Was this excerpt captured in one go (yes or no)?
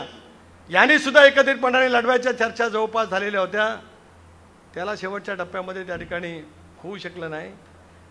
yes